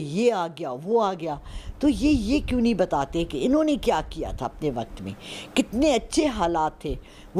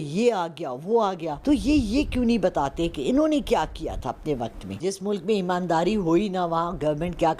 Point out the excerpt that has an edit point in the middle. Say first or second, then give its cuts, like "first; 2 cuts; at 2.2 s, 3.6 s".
second; 2 cuts; at 1.3 s, 4.7 s